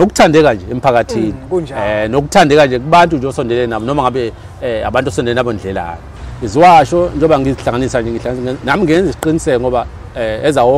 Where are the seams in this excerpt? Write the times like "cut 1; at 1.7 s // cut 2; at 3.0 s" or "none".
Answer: cut 1; at 6.1 s